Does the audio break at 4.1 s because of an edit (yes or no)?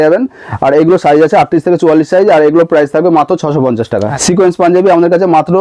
yes